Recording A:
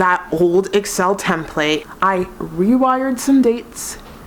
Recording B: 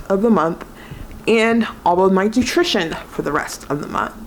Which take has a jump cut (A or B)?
A